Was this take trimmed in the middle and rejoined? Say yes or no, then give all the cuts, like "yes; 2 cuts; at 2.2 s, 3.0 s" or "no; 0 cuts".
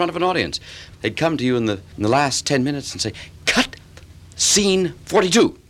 yes; 2 cuts; at 0.8 s, 1.9 s